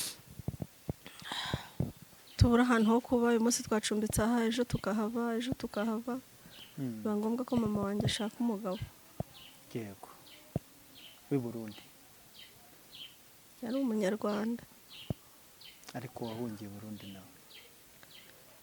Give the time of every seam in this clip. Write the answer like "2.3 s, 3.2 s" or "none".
2.0 s